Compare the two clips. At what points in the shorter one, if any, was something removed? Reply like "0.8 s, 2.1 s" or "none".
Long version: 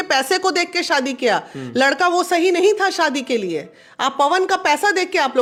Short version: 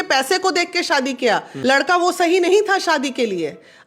1.5 s